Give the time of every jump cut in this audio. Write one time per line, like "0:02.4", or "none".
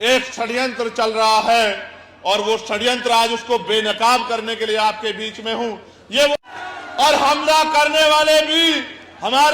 0:06.3